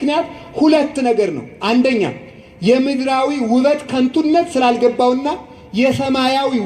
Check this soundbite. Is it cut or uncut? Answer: uncut